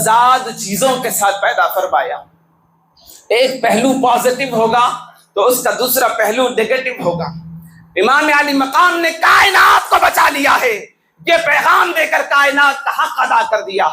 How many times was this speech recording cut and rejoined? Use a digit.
0